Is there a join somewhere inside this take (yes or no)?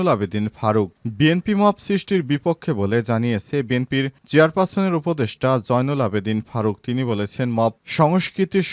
no